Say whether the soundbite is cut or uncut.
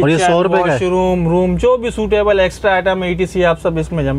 uncut